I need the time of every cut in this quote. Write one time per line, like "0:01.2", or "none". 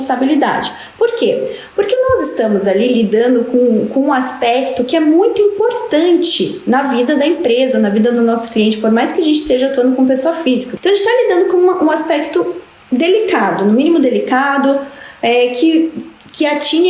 0:10.7